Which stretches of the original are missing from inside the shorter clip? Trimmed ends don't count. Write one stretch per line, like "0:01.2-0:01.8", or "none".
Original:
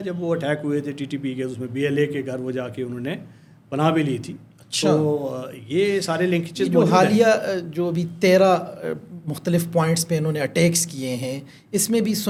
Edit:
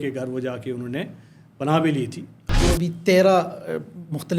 0:04.6-0:07.7

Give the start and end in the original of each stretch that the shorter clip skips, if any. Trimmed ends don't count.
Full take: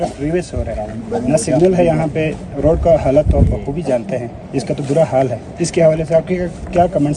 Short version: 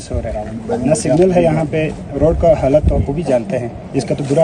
0:03.4-0:03.6

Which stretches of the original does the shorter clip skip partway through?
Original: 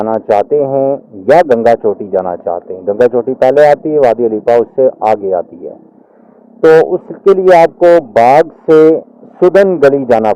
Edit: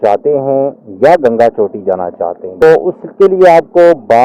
0:02.9-0:06.7

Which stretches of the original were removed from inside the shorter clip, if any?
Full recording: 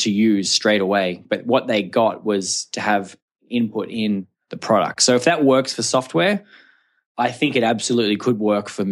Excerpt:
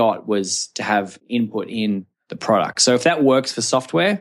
0:03.1-0:03.4

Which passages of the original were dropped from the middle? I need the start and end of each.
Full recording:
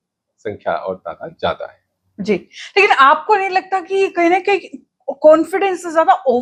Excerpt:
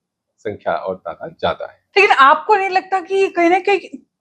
0:01.8-0:02.6

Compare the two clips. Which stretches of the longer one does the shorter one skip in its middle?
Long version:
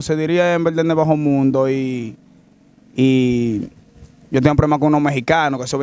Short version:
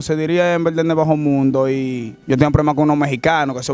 0:02.1-0:04.1

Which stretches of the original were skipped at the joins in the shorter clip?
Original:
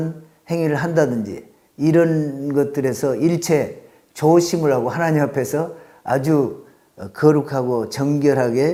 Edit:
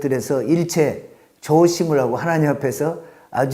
none

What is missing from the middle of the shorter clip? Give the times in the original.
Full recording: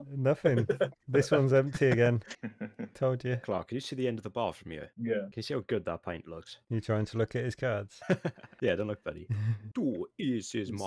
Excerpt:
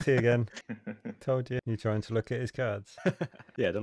0:03.4-0:06.7

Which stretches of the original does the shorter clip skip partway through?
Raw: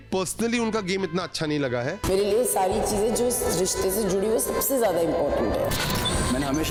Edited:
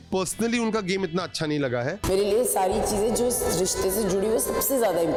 none

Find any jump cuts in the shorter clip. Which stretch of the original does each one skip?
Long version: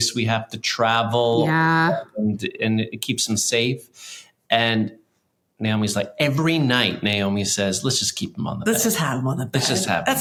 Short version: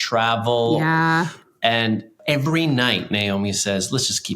0:01.9-0:04.1
0:05.1-0:06.1

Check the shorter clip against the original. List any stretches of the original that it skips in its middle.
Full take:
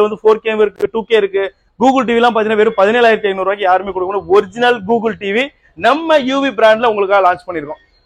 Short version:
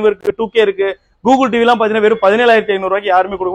none

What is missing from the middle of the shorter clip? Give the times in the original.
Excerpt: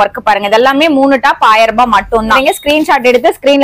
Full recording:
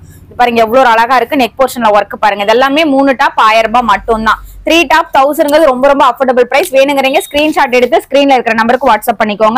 0:04.3-0:07.1

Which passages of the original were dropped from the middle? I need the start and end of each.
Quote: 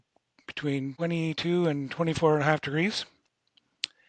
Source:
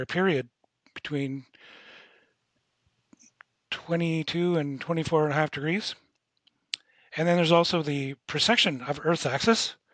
0:01.4-0:03.8

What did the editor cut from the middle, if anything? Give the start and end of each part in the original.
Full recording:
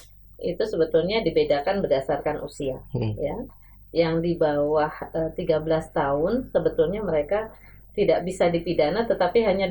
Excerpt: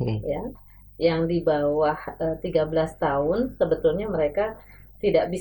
none

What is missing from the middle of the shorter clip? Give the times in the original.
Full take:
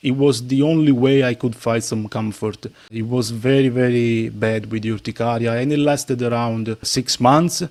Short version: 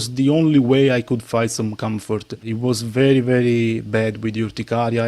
0:02.7-0:02.9

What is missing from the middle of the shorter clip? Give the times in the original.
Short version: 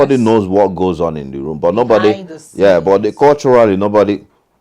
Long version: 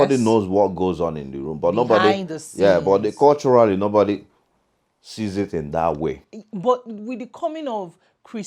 none

